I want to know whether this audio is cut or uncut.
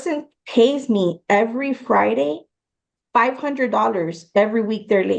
uncut